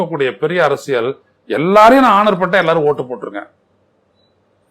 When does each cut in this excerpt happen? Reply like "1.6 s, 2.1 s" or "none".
none